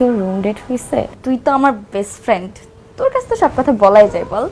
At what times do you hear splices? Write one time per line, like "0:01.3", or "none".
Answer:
0:01.1

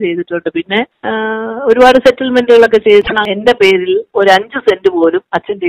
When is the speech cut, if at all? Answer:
0:01.0
0:03.1

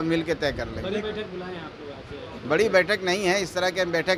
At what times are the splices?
none

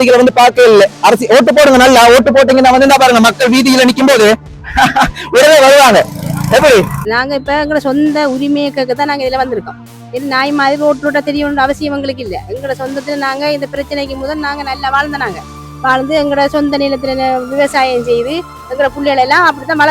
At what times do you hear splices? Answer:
0:07.0

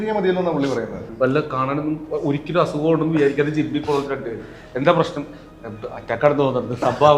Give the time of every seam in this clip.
0:01.0

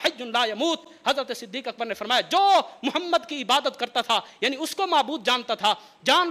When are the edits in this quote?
none

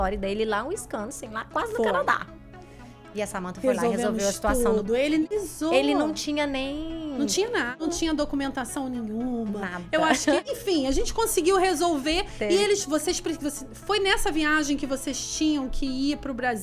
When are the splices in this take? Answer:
0:05.3
0:07.8
0:10.4

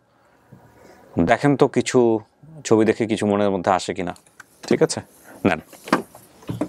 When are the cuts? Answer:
none

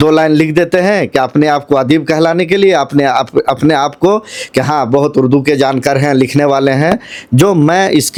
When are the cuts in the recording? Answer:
none

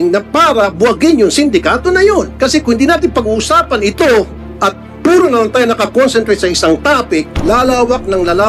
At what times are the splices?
0:02.3
0:04.4
0:07.3

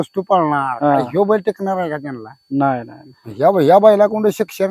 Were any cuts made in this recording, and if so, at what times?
none

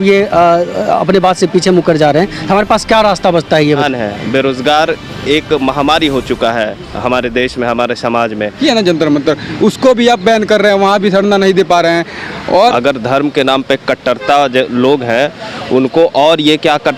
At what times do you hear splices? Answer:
0:03.8
0:08.6
0:12.7

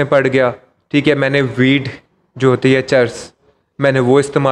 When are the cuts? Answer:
none

